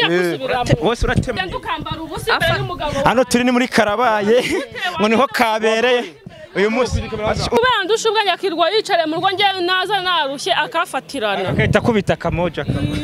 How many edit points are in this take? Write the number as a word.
two